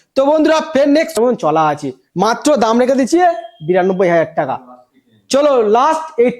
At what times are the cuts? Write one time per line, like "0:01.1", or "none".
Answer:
0:01.2